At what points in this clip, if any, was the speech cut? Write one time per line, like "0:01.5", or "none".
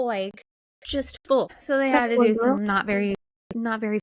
0:01.6